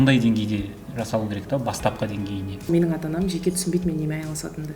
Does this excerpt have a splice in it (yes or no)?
yes